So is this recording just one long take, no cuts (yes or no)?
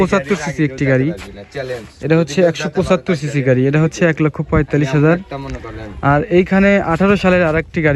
yes